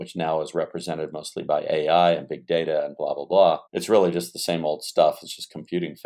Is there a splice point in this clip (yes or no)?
yes